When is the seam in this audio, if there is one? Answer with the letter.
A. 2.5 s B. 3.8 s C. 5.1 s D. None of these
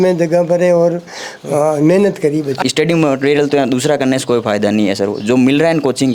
A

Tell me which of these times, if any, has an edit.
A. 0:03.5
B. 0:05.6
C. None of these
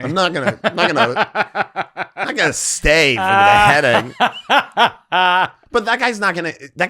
B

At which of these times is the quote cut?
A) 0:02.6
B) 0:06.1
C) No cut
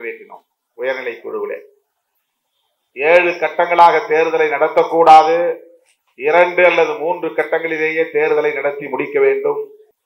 C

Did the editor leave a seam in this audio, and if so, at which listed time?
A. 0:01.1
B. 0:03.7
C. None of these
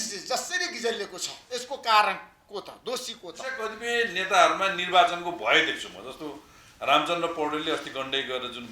B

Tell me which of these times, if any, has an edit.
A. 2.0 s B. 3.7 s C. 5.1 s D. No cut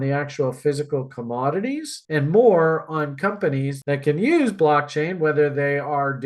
B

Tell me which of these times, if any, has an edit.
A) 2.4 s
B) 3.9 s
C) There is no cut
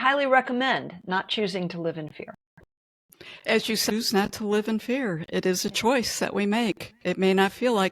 B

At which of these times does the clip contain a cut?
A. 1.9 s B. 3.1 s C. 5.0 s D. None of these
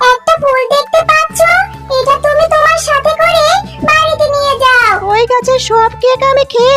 C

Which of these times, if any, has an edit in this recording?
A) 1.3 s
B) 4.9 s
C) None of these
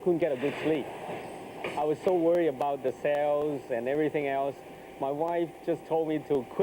C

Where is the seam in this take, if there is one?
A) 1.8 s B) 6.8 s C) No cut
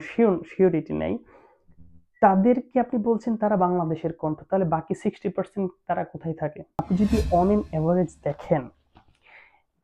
B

